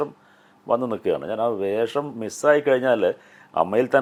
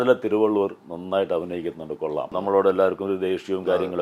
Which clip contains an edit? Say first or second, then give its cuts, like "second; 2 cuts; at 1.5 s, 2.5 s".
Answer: second; 1 cut; at 2.3 s